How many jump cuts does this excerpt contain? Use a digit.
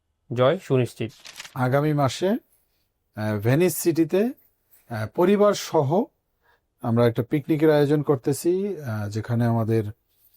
1